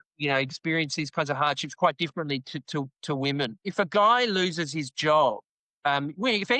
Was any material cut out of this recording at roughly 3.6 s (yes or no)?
yes